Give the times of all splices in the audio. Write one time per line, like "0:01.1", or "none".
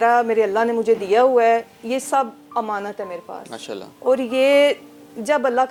none